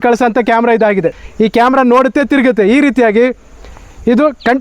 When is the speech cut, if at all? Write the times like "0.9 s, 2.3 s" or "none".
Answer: 1.2 s